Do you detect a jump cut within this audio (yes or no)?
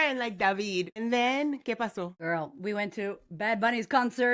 yes